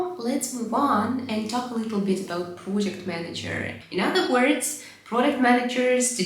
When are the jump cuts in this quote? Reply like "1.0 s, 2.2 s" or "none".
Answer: 3.7 s